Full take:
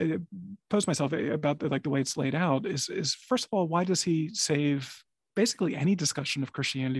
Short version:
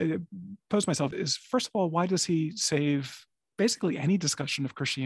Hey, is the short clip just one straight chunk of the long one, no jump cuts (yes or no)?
no